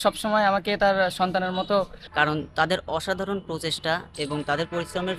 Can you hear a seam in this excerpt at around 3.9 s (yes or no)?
no